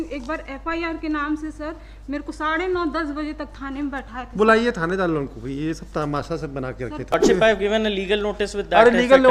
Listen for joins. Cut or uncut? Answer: cut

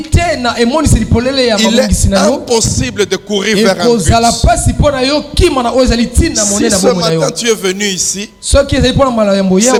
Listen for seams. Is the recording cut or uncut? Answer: uncut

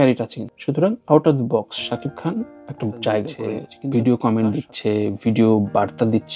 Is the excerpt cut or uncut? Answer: cut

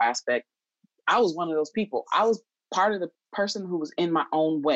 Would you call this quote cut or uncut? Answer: uncut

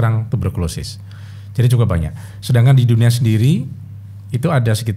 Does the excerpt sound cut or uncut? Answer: uncut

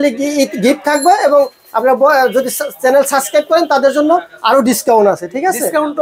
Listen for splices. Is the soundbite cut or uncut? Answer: uncut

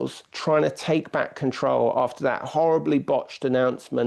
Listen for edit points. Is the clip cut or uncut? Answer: uncut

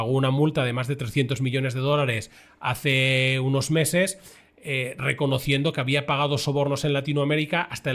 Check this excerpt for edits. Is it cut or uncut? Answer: uncut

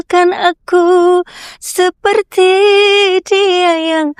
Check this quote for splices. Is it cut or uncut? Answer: uncut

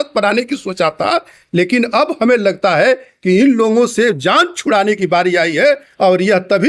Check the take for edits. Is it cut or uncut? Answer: uncut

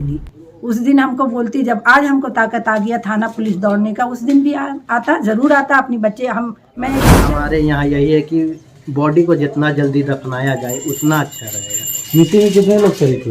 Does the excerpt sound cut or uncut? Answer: cut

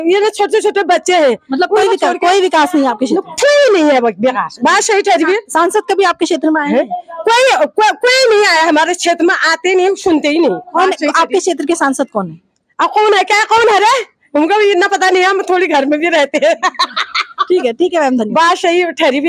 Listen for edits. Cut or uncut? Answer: uncut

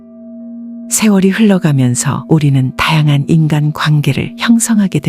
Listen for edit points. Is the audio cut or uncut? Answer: cut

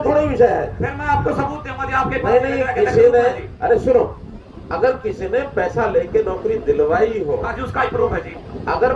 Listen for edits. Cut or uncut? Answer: uncut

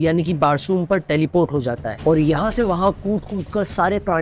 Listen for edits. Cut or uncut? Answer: cut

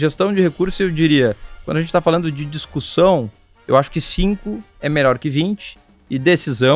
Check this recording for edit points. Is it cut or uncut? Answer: uncut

